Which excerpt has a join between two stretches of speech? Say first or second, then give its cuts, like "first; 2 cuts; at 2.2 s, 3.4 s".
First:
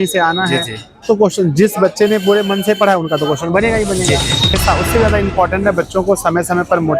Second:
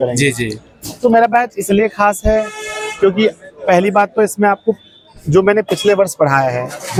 first; 1 cut; at 4.6 s